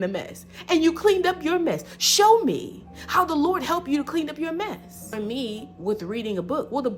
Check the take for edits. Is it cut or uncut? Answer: cut